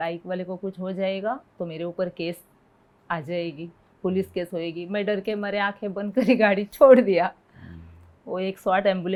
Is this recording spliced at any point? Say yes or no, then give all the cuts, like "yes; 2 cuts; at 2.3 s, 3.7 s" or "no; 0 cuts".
no; 0 cuts